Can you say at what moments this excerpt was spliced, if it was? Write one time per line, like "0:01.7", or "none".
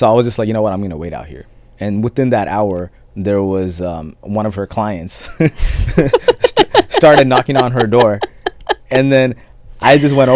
0:01.6
0:04.2